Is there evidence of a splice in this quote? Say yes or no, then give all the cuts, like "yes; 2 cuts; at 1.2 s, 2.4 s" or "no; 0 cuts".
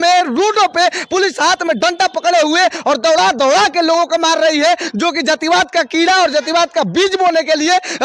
no; 0 cuts